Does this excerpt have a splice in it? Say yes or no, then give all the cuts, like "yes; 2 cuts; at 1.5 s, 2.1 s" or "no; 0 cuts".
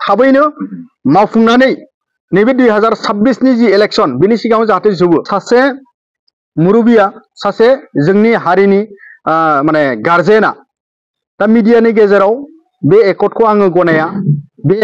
yes; 1 cut; at 5.3 s